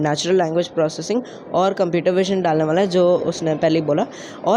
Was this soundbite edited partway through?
no; 0 cuts

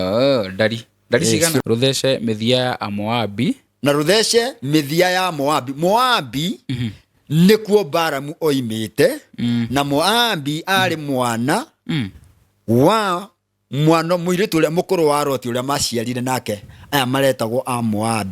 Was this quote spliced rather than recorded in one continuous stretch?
yes; 1 cut; at 1.6 s

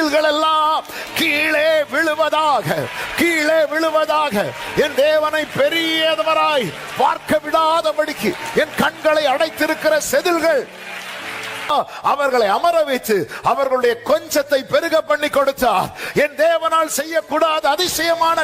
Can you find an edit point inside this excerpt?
yes; 1 cut; at 11.7 s

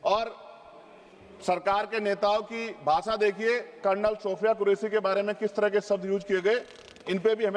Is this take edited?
no; 0 cuts

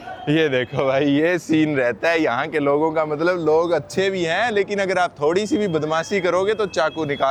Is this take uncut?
yes; 0 cuts

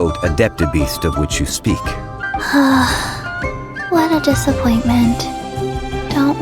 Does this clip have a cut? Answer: yes; 1 cut; at 2.2 s

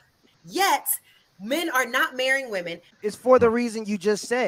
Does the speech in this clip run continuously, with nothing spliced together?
no; 1 cut; at 3.0 s

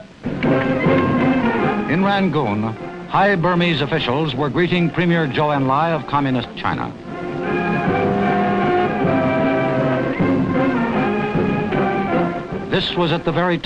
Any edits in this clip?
no; 0 cuts

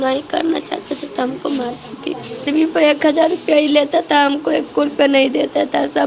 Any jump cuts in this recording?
yes; 1 cut; at 2.4 s

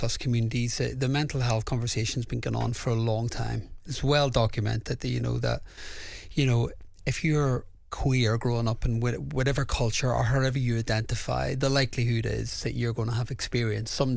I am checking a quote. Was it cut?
no; 0 cuts

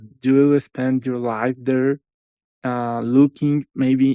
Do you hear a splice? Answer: no; 0 cuts

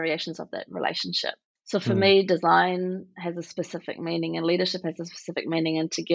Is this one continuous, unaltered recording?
no; 1 cut; at 1.5 s

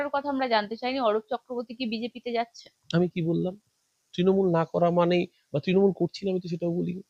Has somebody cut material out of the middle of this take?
no; 0 cuts

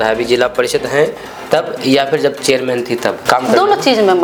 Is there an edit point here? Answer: no; 0 cuts

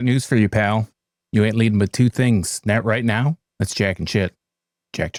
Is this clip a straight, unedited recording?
yes; 0 cuts

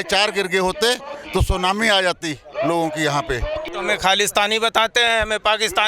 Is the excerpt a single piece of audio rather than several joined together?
no; 1 cut; at 3.6 s

